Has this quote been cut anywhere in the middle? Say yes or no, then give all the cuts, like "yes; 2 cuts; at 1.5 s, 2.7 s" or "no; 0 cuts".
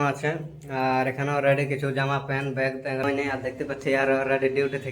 yes; 1 cut; at 3.0 s